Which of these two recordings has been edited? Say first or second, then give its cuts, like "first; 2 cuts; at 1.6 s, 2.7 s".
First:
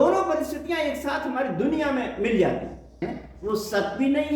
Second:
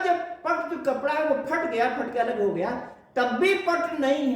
first; 1 cut; at 3.3 s